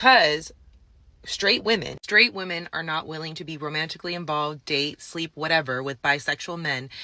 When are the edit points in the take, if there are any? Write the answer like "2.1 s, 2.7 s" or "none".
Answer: none